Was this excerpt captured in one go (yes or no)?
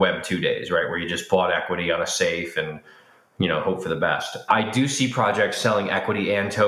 yes